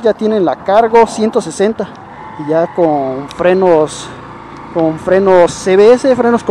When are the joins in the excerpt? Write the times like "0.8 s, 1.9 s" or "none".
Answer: none

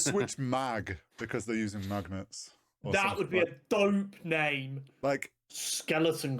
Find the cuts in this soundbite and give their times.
5.4 s

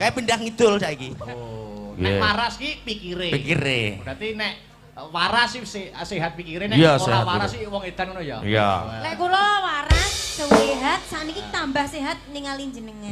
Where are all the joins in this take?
1.1 s

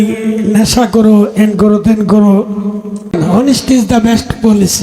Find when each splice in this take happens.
3.2 s

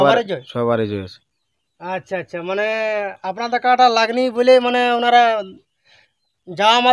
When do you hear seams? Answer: none

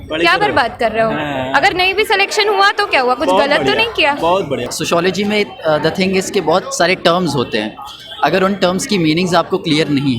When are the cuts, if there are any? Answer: 4.7 s

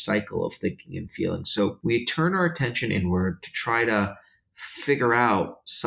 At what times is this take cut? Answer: 1.8 s

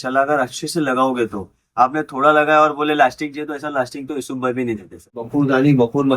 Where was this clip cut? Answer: 5.2 s

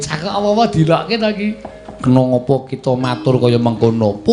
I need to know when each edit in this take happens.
none

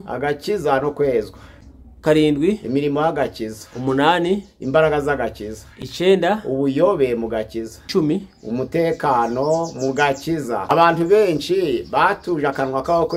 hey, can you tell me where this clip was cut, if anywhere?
10.7 s

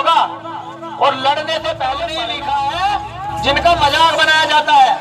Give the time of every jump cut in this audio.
2.1 s

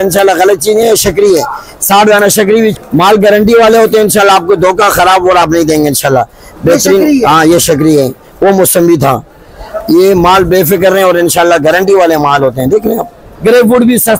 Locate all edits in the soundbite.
2.8 s, 13.2 s

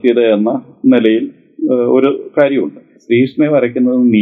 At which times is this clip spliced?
3.0 s

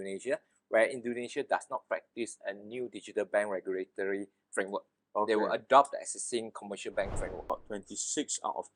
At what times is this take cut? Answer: 7.4 s

